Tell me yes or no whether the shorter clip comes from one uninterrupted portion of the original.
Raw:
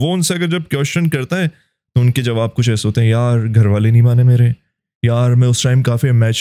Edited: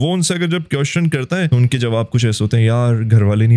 no